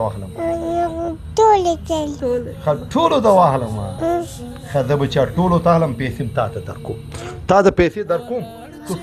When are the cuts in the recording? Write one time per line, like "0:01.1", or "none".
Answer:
none